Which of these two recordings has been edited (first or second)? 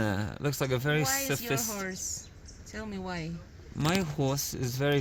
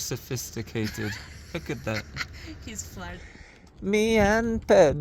second